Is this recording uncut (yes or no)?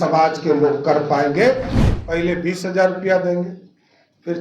no